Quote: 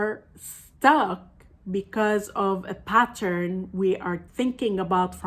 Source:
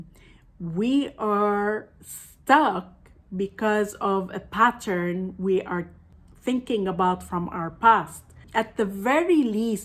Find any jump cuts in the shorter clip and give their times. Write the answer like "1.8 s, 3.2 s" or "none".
4.2 s